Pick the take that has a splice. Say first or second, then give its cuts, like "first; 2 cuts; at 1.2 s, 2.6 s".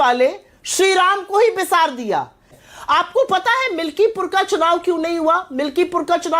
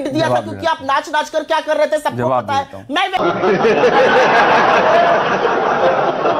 first; 1 cut; at 2.5 s